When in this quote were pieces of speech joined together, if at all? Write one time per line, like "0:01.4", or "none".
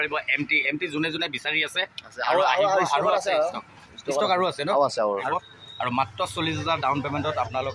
0:05.3

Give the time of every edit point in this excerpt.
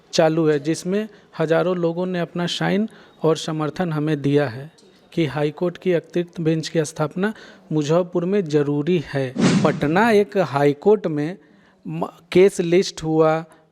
0:09.4

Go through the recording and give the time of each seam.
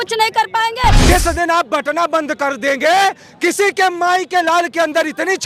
0:01.0

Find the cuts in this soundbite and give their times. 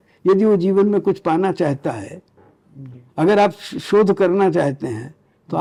none

